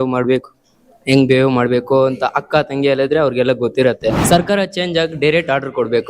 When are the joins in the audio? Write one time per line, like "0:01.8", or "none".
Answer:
0:04.2